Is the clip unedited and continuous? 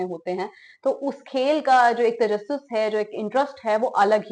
yes; 0 cuts

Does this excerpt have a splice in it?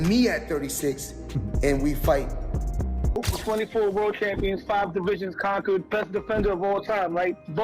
yes; 1 cut; at 3.2 s

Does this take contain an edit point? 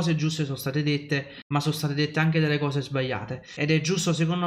yes; 2 cuts; at 1.3 s, 3.5 s

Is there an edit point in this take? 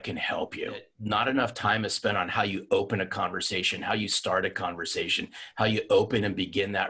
yes; 1 cut; at 0.9 s

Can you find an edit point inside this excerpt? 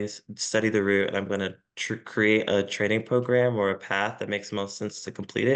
no; 0 cuts

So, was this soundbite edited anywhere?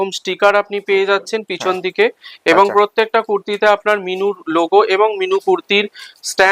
no; 0 cuts

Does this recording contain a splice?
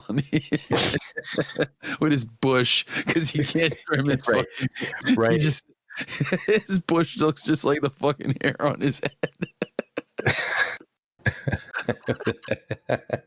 no; 0 cuts

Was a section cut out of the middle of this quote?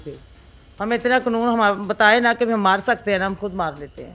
no; 0 cuts

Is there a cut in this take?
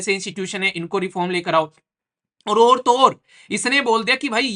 no; 0 cuts

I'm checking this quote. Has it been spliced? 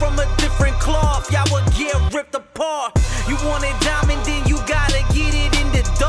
no; 0 cuts

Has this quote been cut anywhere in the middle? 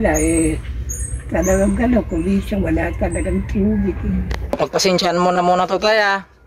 yes; 1 cut; at 4.4 s

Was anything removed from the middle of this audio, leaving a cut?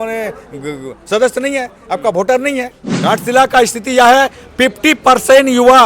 yes; 1 cut; at 2.9 s

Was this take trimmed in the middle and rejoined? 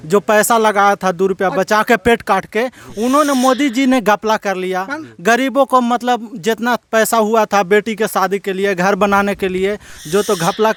no; 0 cuts

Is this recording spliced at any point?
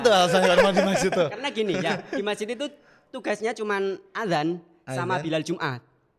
no; 0 cuts

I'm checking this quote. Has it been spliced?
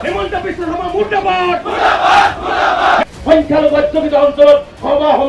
yes; 1 cut; at 3.1 s

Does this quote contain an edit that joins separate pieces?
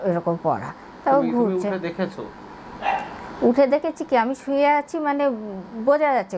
no; 0 cuts

